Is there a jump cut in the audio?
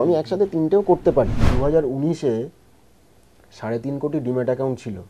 yes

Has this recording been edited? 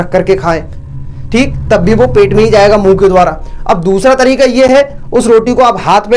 no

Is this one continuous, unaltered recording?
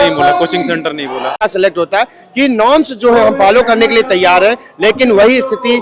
no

